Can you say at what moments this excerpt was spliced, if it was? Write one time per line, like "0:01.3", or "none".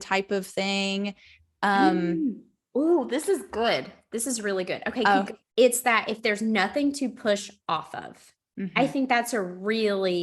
0:05.4